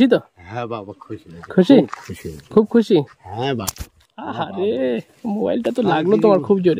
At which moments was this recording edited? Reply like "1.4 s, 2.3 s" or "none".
none